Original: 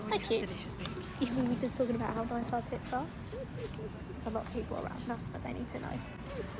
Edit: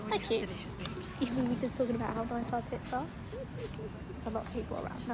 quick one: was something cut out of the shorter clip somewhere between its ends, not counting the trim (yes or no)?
no